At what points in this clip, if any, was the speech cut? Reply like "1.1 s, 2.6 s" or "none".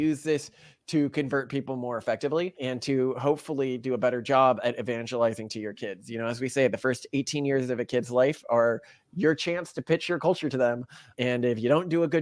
2.6 s